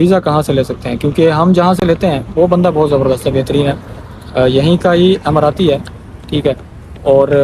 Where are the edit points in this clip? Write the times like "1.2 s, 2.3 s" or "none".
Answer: none